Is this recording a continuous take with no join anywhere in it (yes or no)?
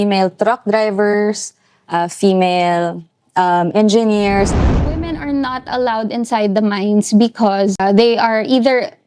no